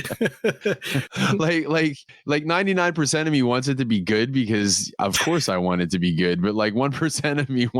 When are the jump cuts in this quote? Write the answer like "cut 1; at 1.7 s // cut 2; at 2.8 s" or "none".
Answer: cut 1; at 1.1 s

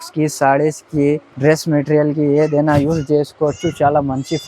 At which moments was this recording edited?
cut 1; at 1.3 s

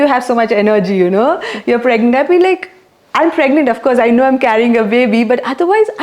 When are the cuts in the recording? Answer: none

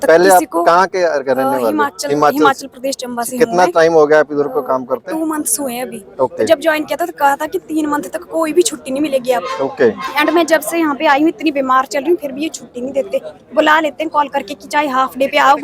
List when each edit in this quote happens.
none

